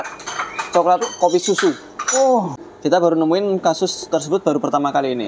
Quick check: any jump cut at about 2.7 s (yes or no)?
yes